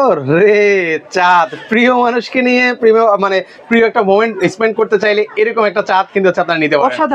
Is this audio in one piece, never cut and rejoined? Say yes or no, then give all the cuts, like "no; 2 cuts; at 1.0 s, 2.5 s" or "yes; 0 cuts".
yes; 0 cuts